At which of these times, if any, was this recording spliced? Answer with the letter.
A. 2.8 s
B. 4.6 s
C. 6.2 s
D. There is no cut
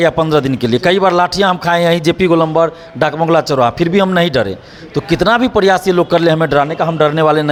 D